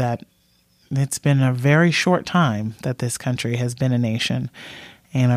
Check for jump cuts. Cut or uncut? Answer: uncut